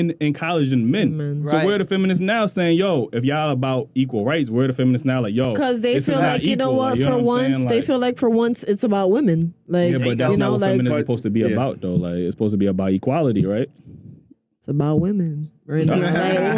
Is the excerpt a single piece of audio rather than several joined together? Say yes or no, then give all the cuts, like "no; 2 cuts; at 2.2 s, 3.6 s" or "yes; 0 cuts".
yes; 0 cuts